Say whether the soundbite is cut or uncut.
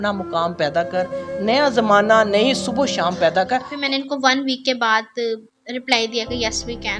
cut